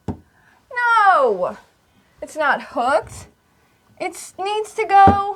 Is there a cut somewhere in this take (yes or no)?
no